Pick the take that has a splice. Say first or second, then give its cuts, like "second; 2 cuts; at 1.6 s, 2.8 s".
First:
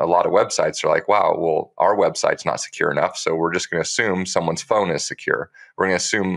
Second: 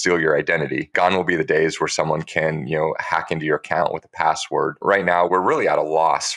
second; 2 cuts; at 0.8 s, 4.8 s